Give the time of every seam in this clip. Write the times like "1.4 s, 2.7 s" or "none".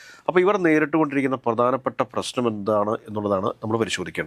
none

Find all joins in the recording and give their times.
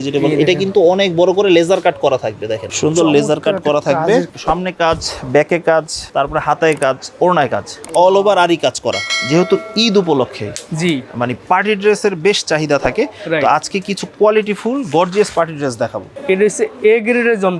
2.7 s, 4.3 s, 6.0 s, 9.1 s, 16.1 s

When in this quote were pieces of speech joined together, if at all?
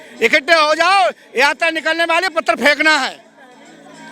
none

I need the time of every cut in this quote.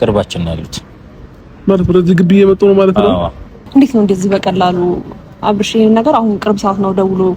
3.5 s

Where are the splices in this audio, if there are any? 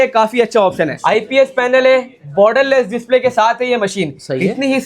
1.0 s

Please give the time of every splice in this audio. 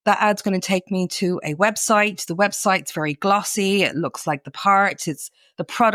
none

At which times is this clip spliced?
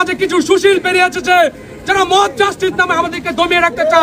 none

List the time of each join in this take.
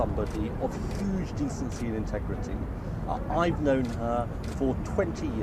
1.1 s

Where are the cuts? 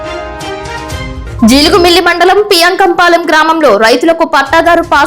1.2 s

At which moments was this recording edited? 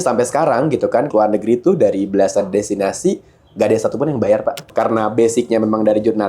1.1 s, 4.7 s

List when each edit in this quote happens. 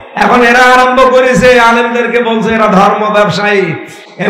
none

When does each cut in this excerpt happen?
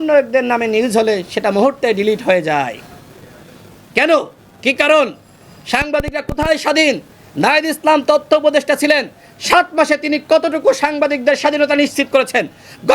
none

